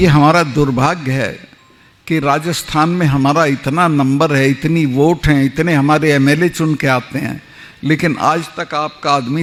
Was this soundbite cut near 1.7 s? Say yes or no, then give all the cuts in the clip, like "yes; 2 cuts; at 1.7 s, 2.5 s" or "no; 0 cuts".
no; 0 cuts